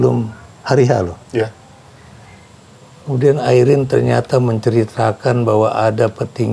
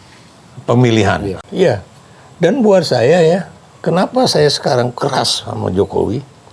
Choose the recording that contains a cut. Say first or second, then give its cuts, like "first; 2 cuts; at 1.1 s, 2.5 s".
second; 1 cut; at 1.4 s